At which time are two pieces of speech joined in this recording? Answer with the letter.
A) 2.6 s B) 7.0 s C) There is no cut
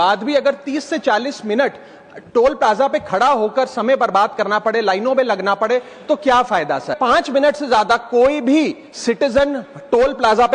B